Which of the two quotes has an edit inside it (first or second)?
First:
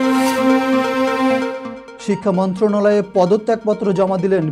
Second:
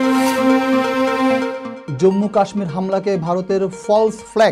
first